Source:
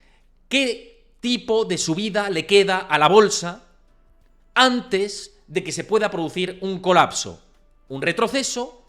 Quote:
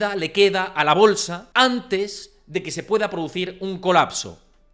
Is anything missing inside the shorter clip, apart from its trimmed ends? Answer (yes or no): yes